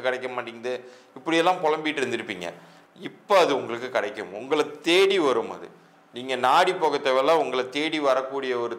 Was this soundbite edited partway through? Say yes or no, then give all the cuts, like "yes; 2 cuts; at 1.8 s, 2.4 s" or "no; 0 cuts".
no; 0 cuts